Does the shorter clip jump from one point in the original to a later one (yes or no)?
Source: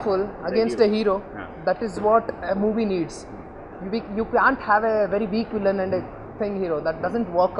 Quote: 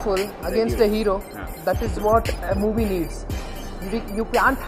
no